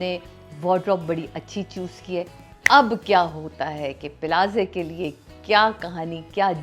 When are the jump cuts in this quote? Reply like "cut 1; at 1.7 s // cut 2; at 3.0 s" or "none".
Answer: cut 1; at 2.4 s